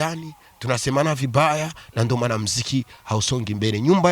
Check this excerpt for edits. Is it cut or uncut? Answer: uncut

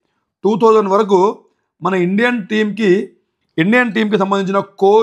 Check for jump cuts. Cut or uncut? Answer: uncut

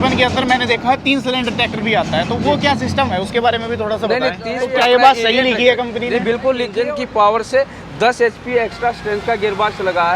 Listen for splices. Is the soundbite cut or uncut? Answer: cut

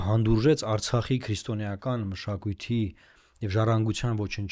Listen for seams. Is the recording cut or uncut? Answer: uncut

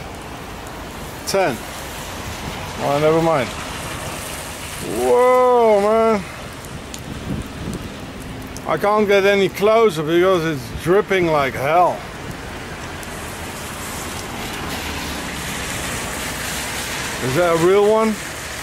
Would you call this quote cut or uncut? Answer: uncut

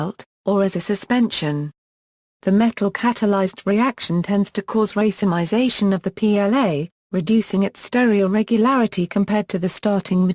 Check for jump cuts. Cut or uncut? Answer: uncut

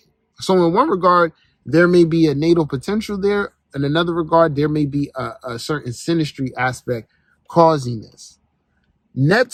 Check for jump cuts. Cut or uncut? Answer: uncut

